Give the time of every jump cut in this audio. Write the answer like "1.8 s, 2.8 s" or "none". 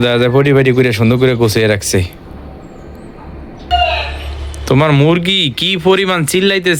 3.7 s